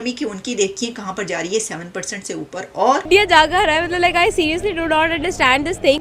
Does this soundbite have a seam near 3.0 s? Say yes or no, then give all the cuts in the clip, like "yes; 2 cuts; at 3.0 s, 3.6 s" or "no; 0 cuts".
yes; 1 cut; at 3.0 s